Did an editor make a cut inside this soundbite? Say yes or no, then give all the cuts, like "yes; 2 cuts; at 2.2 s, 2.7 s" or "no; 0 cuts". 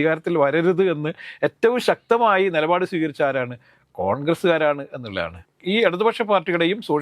yes; 1 cut; at 5.4 s